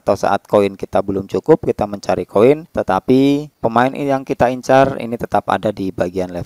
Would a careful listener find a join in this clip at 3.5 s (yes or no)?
yes